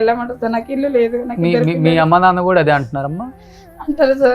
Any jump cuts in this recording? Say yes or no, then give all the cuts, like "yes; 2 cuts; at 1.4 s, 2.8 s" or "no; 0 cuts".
no; 0 cuts